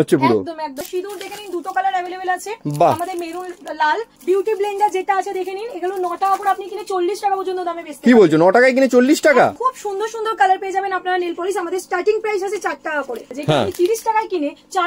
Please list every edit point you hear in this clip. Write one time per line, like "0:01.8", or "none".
0:00.8
0:04.1
0:09.6
0:13.3